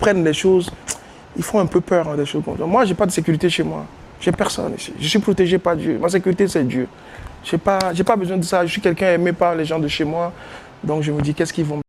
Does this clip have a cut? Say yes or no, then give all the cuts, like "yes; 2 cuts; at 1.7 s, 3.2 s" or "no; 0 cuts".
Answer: no; 0 cuts